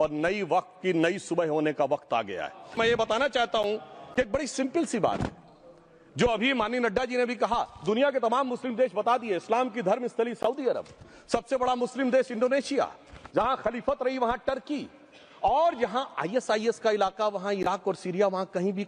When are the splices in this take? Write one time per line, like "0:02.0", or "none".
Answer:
0:02.8